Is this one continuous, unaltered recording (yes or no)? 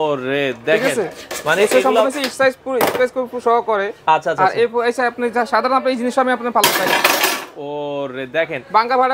yes